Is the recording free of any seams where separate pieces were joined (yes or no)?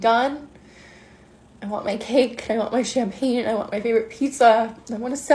yes